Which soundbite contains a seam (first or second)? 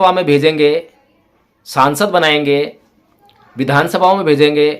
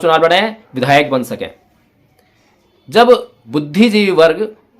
second